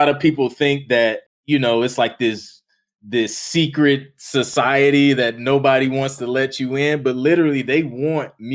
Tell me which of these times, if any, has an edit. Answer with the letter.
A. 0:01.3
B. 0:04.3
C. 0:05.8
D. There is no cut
A